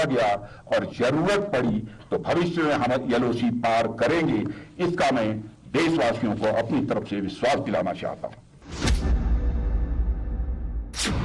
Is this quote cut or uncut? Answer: cut